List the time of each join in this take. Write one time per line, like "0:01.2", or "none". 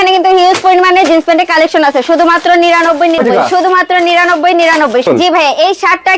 0:03.2
0:05.1